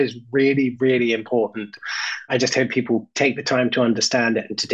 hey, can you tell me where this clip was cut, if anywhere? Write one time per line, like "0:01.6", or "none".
none